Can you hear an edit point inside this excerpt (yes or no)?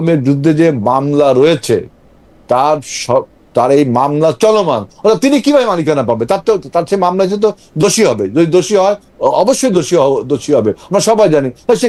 no